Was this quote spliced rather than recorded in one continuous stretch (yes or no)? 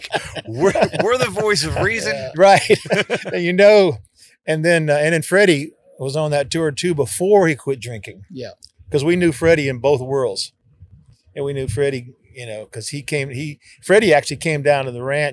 no